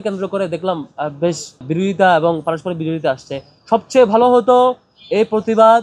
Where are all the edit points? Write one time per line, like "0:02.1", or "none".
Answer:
0:01.7